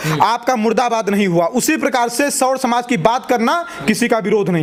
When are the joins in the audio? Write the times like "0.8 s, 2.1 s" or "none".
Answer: none